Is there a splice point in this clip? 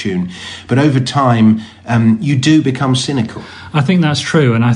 yes; 1 cut; at 2.5 s

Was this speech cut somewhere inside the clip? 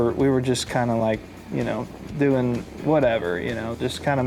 no; 0 cuts

